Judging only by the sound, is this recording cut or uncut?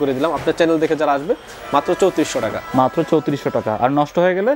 uncut